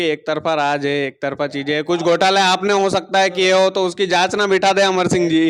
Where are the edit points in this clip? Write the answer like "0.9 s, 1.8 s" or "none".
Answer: none

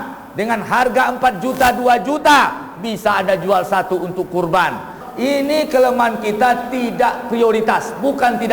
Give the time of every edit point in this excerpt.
5.0 s

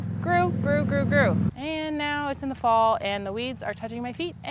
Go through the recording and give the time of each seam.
1.5 s

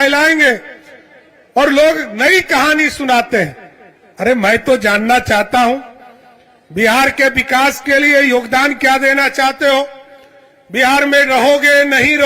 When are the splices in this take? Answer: none

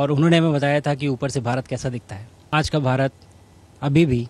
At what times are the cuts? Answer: 2.5 s

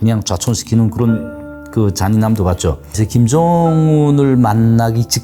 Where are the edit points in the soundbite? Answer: 2.9 s

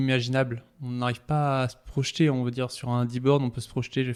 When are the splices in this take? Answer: none

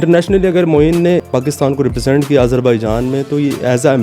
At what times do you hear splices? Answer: 1.2 s

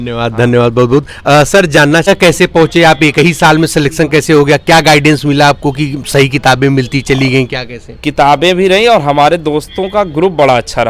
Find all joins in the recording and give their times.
2.1 s

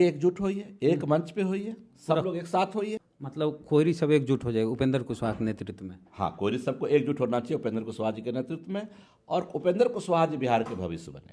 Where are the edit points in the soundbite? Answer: 3.1 s

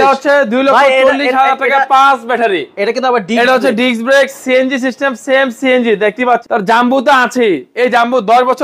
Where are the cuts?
6.4 s

